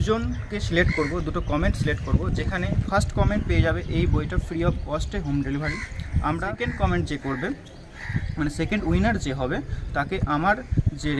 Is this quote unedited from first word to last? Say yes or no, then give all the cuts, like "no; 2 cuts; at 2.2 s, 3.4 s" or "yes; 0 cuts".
no; 1 cut; at 6.5 s